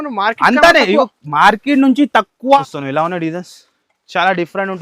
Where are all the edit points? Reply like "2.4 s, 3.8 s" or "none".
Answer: 2.6 s